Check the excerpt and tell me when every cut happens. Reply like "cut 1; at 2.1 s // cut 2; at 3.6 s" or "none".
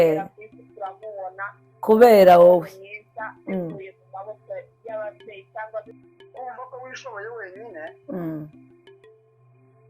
cut 1; at 6.0 s